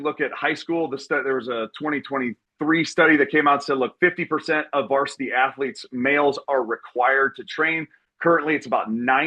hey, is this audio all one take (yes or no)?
yes